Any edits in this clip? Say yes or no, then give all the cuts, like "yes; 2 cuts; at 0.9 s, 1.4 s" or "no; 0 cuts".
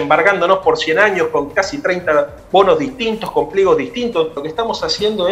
yes; 1 cut; at 4.4 s